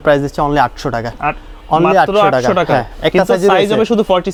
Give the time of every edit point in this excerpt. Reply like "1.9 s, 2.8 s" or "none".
none

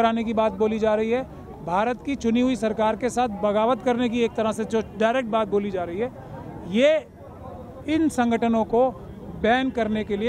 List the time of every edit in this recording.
none

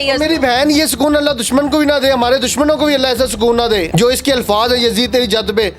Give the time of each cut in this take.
3.9 s

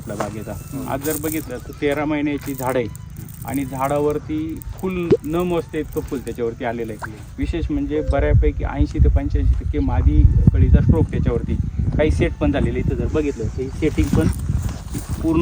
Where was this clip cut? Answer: none

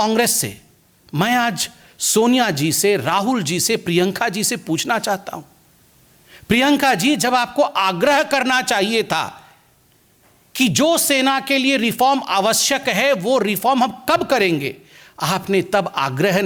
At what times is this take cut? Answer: none

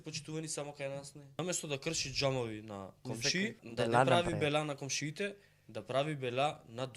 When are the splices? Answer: 1.4 s, 3.6 s

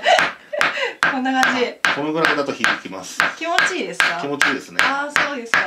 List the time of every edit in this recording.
none

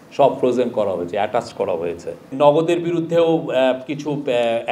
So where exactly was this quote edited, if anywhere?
2.3 s

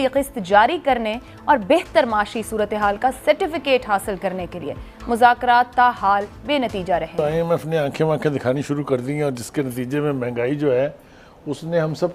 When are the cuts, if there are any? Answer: 7.2 s

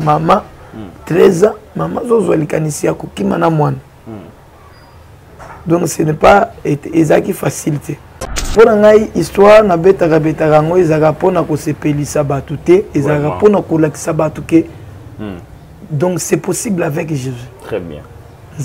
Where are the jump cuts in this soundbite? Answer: 8.5 s

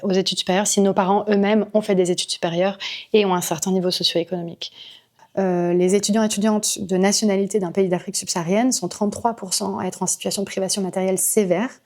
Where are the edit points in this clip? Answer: 5.1 s

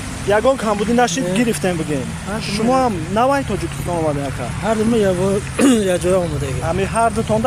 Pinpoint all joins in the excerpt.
none

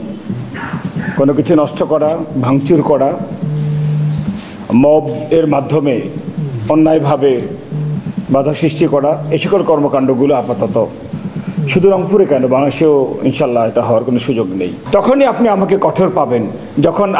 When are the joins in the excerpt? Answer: 14.8 s

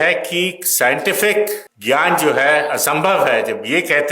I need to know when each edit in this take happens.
1.7 s

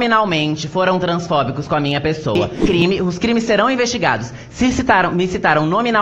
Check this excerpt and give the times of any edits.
2.5 s

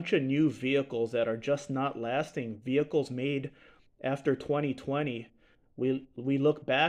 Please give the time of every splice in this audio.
none

